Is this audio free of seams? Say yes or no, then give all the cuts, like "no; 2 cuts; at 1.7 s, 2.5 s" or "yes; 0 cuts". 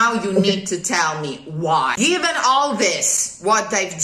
no; 1 cut; at 1.9 s